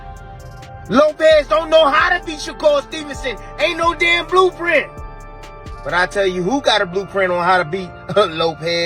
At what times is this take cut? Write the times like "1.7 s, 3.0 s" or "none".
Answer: none